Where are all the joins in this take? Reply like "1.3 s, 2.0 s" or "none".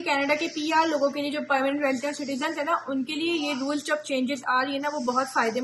none